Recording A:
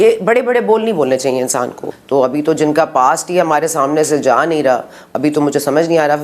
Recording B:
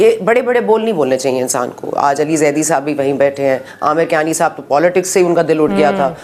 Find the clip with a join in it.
A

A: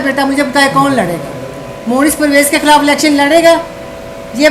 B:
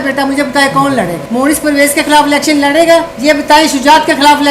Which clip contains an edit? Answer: B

